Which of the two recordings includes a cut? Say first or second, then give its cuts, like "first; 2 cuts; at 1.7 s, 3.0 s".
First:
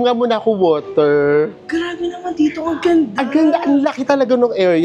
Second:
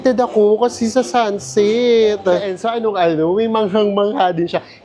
second; 1 cut; at 2.6 s